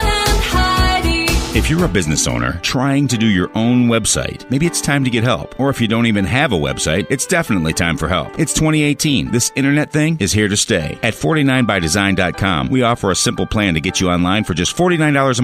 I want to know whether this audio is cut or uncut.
cut